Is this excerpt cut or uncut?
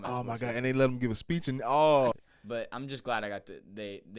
cut